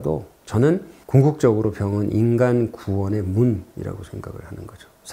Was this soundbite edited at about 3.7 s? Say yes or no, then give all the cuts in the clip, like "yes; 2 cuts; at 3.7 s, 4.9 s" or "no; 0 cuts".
no; 1 cut; at 0.9 s